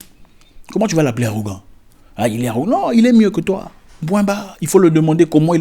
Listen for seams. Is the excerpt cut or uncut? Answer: uncut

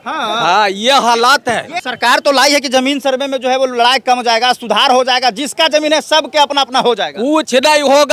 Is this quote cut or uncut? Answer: cut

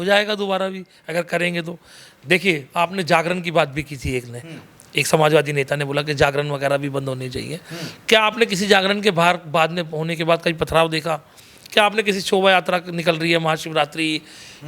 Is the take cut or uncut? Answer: uncut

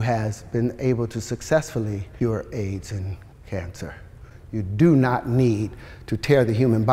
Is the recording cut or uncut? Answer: cut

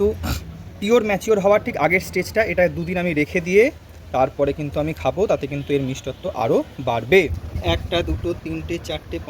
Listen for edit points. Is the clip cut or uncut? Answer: cut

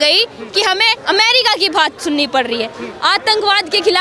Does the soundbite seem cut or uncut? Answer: cut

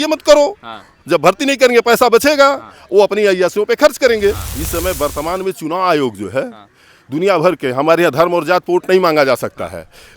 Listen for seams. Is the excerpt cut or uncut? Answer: cut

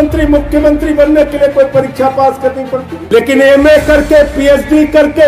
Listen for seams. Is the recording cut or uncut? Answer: cut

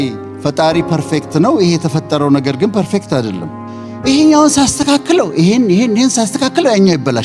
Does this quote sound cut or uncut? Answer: uncut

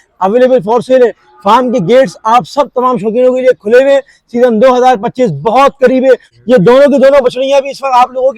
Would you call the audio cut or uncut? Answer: cut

